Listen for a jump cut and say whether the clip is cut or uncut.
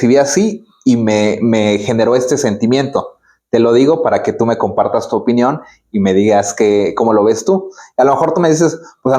uncut